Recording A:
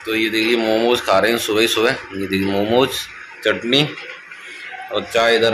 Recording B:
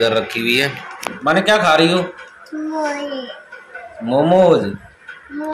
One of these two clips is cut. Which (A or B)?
B